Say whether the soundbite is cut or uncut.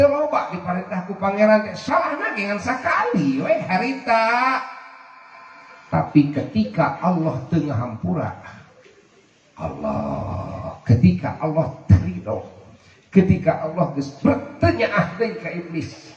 uncut